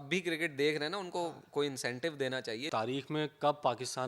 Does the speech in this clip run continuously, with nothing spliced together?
no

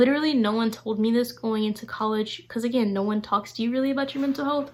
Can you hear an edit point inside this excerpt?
no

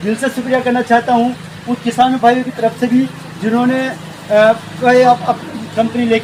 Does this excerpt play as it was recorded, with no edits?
yes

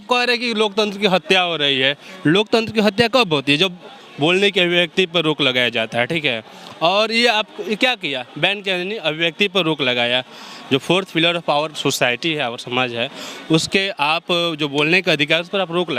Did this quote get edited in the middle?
no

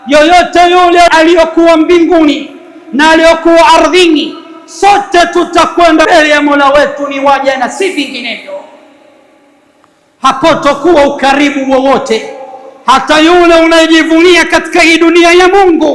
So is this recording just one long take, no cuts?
no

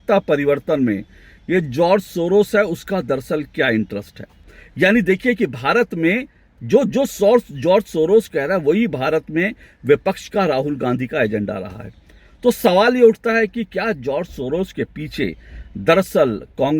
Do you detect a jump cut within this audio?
yes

